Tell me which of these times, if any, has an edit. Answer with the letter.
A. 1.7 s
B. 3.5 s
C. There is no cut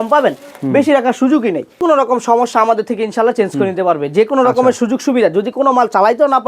A